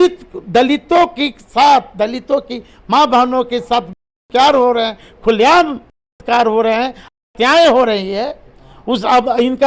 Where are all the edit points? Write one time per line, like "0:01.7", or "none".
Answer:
none